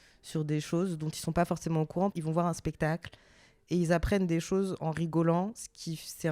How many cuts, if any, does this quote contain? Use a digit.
1